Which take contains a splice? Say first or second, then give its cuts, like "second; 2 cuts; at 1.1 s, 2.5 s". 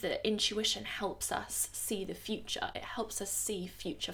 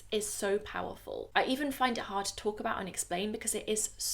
second; 1 cut; at 1.2 s